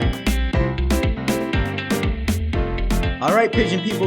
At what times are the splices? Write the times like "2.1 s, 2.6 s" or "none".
3.0 s